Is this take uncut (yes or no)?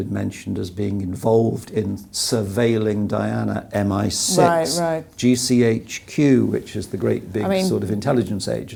yes